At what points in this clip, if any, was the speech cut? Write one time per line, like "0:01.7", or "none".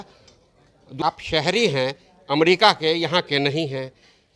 0:01.0